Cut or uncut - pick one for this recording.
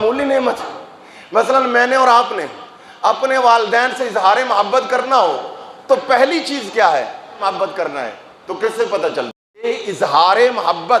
cut